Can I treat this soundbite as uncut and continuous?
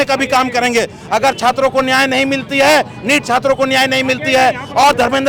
yes; 0 cuts

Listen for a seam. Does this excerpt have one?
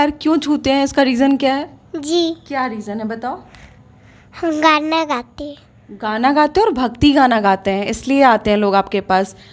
no; 0 cuts

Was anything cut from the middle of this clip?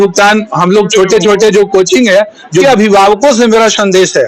yes; 1 cut; at 2.6 s

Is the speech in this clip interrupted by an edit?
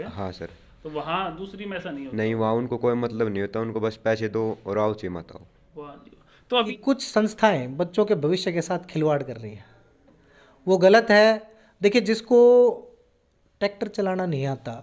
yes; 1 cut; at 6.7 s

